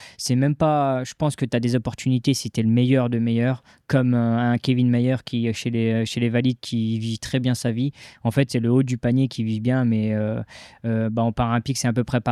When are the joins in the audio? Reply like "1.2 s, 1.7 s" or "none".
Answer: none